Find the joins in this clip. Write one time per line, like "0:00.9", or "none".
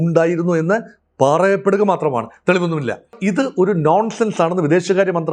0:03.2